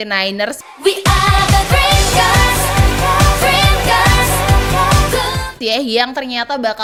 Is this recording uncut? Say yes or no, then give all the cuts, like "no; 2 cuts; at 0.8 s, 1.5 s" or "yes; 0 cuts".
yes; 0 cuts